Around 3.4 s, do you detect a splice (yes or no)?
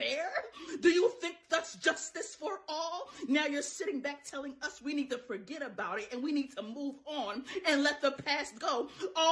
no